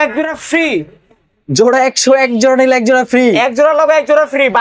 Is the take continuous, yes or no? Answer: yes